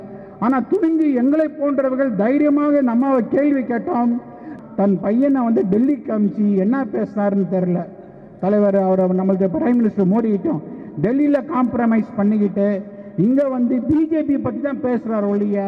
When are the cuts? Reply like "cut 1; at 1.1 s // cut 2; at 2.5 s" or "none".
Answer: cut 1; at 4.5 s